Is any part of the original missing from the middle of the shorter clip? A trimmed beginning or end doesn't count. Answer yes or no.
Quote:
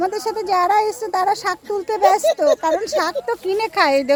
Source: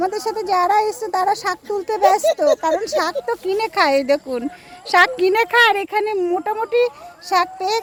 no